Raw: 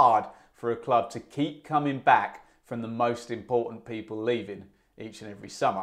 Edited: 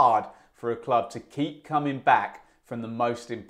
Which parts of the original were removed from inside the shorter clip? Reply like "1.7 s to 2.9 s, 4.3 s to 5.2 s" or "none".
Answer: none